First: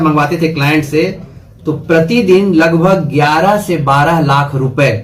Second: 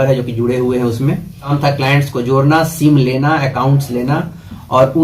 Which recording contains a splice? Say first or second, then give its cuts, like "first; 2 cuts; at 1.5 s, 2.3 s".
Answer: second; 1 cut; at 1.5 s